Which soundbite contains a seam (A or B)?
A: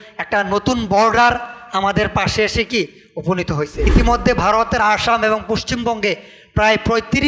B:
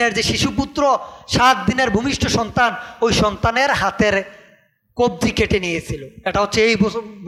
A